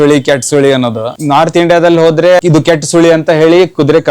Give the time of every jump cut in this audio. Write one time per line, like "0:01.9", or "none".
0:01.1
0:02.4

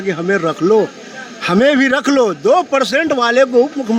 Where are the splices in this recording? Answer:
none

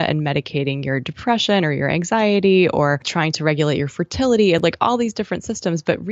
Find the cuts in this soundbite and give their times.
0:03.1

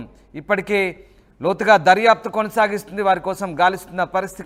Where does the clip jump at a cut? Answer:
none

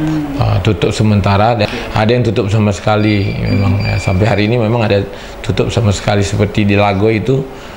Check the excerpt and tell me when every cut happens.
0:01.7

